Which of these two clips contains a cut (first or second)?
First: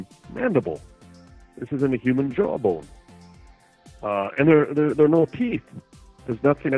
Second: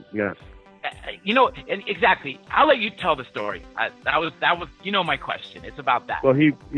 second